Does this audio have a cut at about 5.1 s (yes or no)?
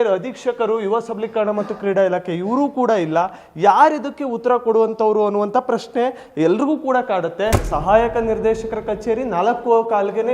no